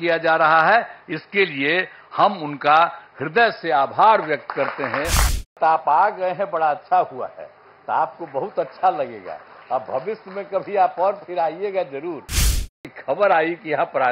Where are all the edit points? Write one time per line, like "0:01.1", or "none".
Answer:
0:05.5
0:12.6